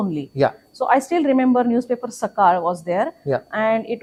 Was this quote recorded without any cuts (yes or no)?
yes